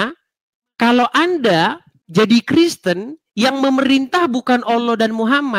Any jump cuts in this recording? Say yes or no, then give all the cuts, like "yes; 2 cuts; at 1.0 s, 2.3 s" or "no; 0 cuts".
no; 0 cuts